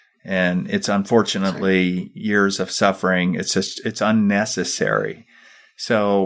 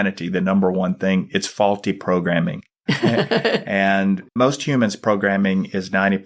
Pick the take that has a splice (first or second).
second